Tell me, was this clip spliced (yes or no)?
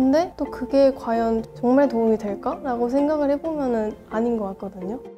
no